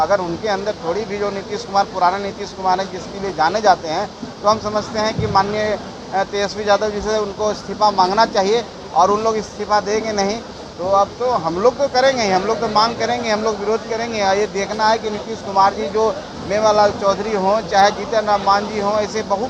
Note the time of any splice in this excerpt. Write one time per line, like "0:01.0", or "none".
none